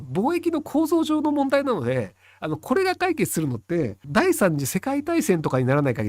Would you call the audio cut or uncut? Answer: cut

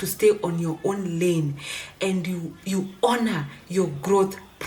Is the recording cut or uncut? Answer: uncut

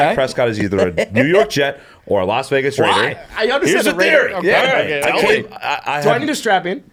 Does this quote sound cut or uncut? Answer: uncut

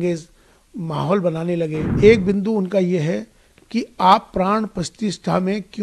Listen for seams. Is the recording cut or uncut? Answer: cut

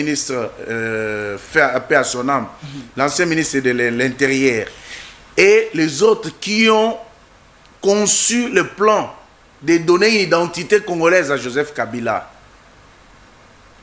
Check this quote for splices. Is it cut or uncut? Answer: uncut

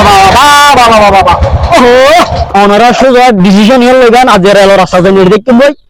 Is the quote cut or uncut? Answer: cut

